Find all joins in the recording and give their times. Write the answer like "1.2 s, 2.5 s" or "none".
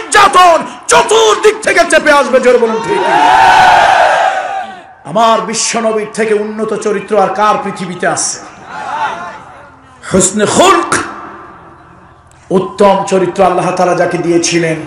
none